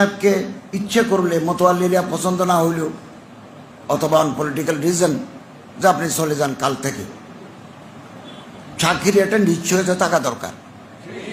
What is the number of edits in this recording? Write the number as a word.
zero